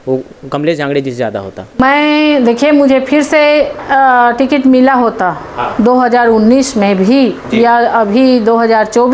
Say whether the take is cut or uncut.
uncut